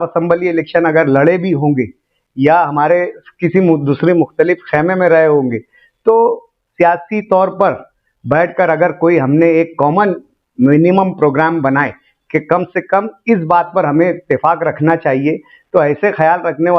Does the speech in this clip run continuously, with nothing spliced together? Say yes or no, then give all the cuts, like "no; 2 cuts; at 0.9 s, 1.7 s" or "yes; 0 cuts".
yes; 0 cuts